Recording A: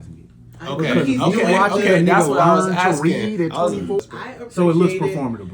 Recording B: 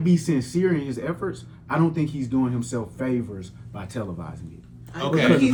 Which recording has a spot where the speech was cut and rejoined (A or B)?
A